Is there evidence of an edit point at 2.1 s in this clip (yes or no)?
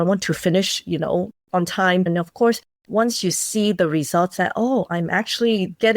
yes